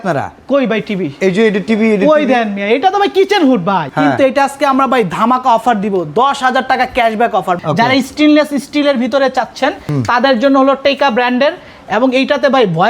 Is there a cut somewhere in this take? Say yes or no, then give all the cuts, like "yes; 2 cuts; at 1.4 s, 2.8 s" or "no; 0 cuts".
yes; 3 cuts; at 3.8 s, 7.6 s, 9.8 s